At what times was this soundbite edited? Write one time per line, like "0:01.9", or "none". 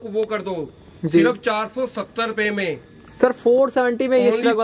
none